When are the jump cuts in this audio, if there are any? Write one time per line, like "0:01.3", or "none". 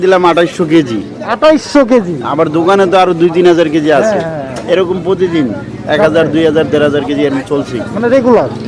none